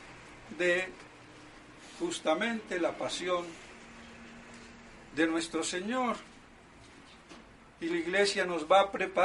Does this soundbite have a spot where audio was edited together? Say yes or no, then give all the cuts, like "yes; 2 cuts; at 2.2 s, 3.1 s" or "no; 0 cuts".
yes; 1 cut; at 5.1 s